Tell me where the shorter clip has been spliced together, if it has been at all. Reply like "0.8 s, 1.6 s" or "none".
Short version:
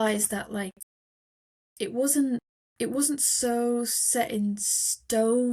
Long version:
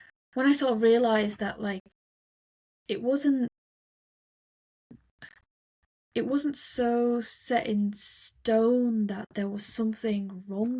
2.6 s